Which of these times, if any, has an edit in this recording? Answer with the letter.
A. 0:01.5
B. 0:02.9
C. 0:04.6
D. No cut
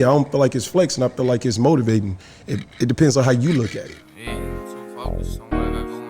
C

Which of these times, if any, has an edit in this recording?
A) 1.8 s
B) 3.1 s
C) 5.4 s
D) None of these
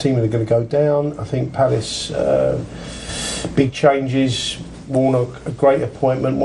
A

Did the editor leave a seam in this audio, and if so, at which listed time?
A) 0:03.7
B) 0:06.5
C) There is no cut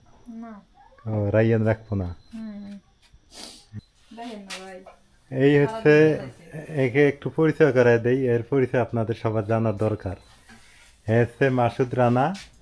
A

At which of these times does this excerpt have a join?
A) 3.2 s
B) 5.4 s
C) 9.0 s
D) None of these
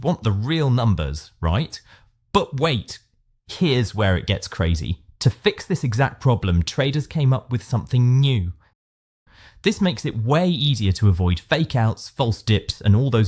C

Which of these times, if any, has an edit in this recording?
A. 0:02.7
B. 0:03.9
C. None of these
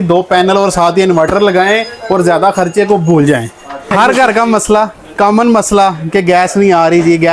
B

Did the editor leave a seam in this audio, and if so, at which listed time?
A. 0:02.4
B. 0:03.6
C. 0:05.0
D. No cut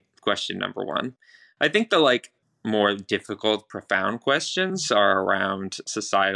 A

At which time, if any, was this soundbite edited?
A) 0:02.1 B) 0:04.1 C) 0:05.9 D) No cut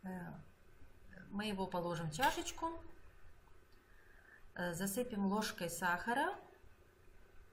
A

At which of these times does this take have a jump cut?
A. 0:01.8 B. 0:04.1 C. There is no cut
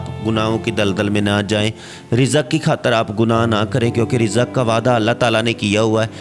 C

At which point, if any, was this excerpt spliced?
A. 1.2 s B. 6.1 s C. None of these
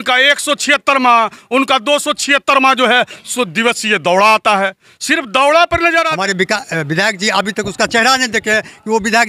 B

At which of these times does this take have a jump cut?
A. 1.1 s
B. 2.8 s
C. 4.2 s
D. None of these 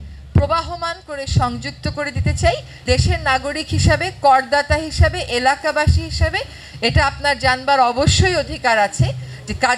B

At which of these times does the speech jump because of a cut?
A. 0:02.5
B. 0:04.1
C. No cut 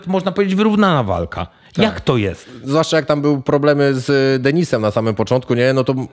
A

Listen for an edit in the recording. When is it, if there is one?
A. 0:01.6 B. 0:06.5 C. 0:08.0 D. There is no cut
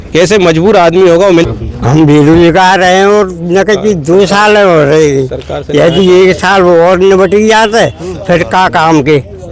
A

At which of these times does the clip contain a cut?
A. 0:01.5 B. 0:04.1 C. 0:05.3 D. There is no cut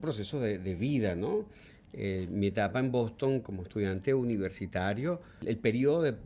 C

